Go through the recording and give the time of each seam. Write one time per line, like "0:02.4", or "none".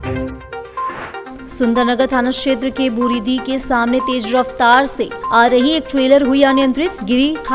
0:01.4